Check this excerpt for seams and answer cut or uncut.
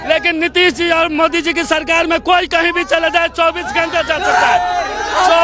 uncut